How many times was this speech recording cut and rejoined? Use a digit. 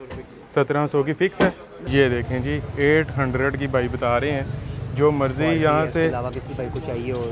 1